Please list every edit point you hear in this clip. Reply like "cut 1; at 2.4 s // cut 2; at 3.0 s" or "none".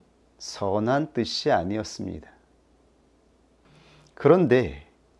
cut 1; at 3.6 s